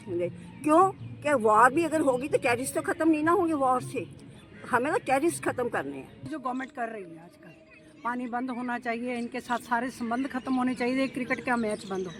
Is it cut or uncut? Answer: cut